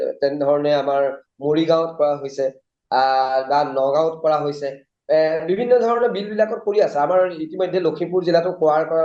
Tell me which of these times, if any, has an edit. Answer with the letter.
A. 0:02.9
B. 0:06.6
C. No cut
C